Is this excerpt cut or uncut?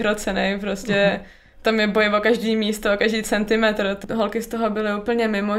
cut